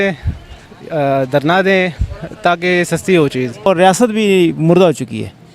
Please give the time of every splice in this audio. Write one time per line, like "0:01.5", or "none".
0:03.7